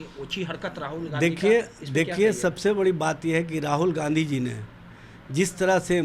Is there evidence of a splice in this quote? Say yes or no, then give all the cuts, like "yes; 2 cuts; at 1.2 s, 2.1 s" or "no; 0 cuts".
no; 0 cuts